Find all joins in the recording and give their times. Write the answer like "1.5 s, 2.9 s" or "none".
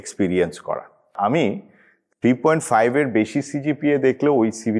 1.1 s